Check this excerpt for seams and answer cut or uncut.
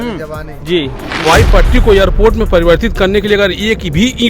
cut